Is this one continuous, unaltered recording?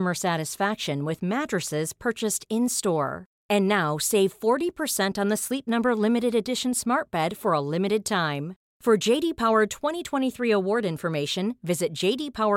yes; 0 cuts

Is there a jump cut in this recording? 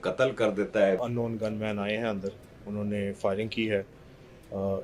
yes; 1 cut; at 1.0 s

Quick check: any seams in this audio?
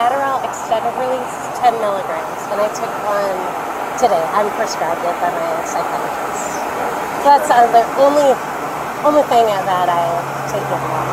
no; 0 cuts

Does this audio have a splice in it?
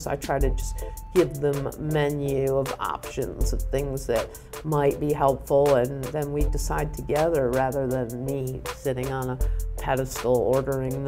no; 0 cuts

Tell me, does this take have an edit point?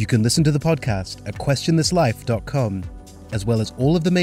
no; 0 cuts

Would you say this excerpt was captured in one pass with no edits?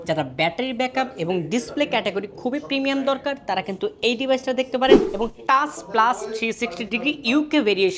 no; 1 cut; at 5.1 s

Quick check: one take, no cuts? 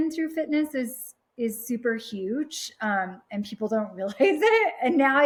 yes; 0 cuts

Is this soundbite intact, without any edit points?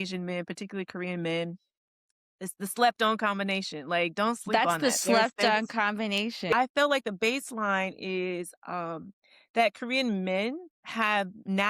no; 1 cut; at 6.5 s

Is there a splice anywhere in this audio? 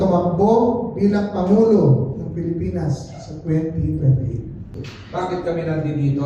yes; 1 cut; at 4.9 s

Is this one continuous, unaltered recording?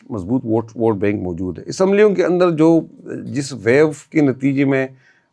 yes; 0 cuts

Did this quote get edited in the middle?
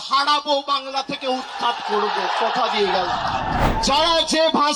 yes; 1 cut; at 3.7 s

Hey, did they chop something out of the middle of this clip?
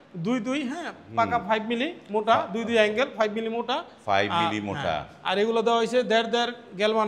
no; 0 cuts

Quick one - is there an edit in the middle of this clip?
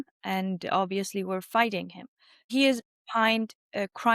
yes; 1 cut; at 2.5 s

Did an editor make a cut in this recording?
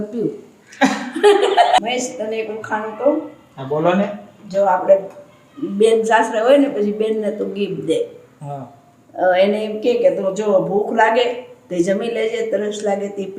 yes; 1 cut; at 1.8 s

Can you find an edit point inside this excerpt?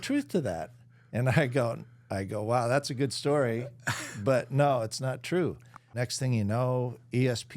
yes; 1 cut; at 6.0 s

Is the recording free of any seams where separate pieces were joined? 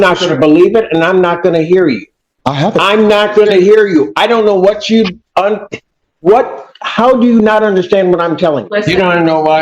no; 1 cut; at 8.7 s

